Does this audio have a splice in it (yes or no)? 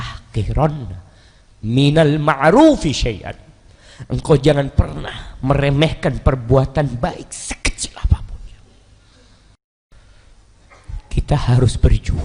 yes